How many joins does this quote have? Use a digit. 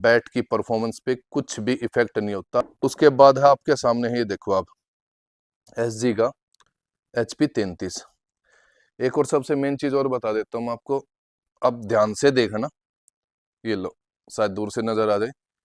1